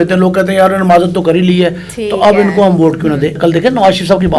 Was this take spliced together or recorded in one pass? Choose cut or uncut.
cut